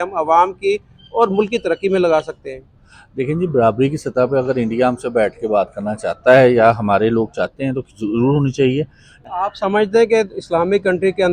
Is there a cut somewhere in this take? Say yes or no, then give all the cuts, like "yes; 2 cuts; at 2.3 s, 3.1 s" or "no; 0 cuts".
yes; 1 cut; at 9.1 s